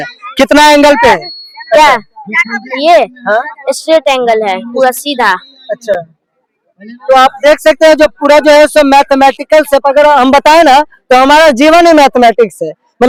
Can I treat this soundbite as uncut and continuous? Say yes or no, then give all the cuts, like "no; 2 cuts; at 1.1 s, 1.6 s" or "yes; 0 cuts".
yes; 0 cuts